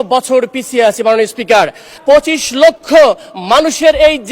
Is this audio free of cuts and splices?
no; 1 cut; at 1.9 s

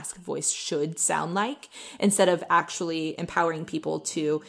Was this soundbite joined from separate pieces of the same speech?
no; 0 cuts

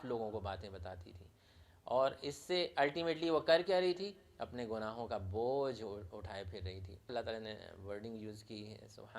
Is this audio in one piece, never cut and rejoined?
no; 1 cut; at 7.1 s

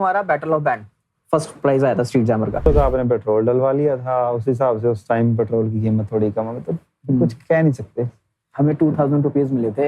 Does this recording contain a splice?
yes; 1 cut; at 2.6 s

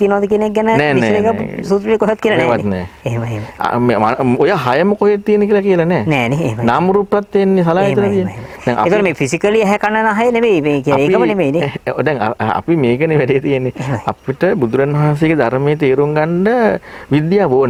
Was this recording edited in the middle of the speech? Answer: no; 0 cuts

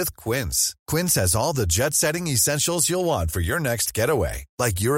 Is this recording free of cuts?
yes; 0 cuts

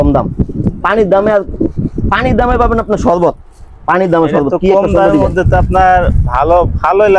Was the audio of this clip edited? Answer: no; 0 cuts

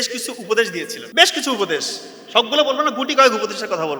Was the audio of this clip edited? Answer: yes; 1 cut; at 1.0 s

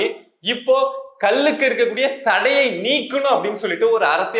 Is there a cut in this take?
no; 0 cuts

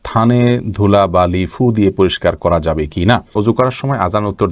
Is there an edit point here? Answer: yes; 1 cut; at 3.3 s

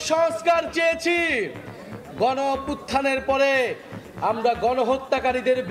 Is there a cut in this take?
no; 0 cuts

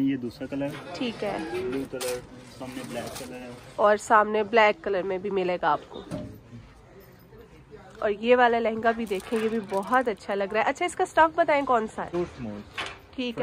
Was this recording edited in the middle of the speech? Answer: no; 0 cuts

